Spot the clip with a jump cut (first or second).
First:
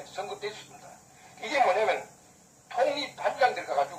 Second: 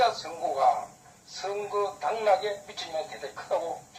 second